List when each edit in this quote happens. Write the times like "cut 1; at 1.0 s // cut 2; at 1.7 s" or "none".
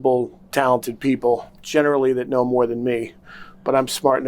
cut 1; at 1.5 s